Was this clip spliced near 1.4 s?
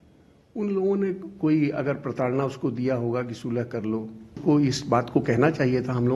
no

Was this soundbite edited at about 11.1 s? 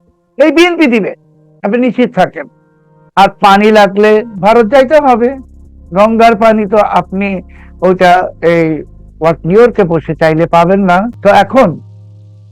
yes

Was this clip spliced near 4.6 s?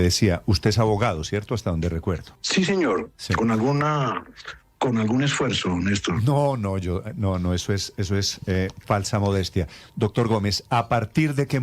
no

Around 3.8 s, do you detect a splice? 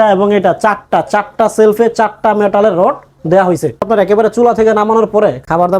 yes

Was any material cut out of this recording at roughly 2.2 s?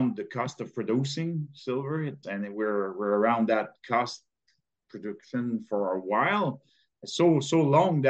yes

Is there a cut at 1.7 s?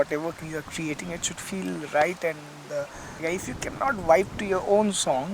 no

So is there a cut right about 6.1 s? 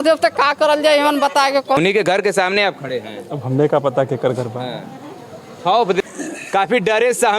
yes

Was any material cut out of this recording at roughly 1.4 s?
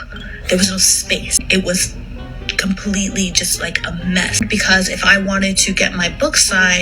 yes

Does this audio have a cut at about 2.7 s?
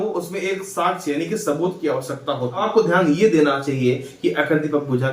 yes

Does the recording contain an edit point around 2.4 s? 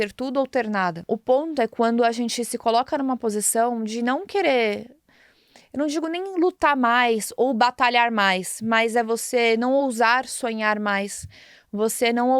no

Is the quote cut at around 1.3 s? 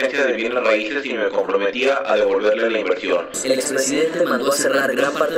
no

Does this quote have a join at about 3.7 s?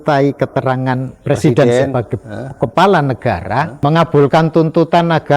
yes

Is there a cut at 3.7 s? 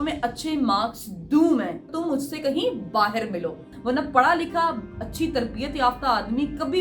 yes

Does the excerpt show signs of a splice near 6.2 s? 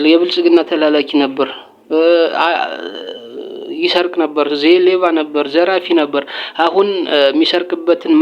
no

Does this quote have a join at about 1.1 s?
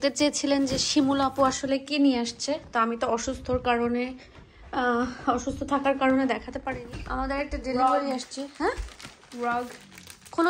no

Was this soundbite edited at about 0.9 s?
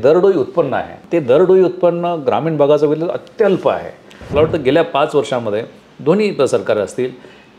yes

